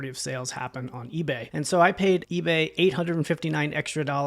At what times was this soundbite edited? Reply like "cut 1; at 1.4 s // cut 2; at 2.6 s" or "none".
cut 1; at 1.5 s // cut 2; at 2.3 s